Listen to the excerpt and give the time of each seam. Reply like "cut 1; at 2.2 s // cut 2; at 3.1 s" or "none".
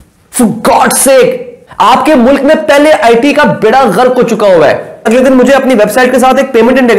none